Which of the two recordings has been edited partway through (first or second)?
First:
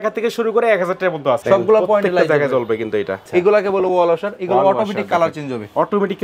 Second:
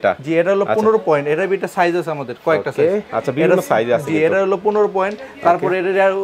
first